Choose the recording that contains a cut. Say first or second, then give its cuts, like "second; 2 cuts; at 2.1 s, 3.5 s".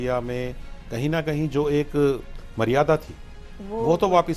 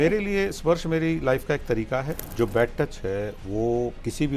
second; 1 cut; at 2.2 s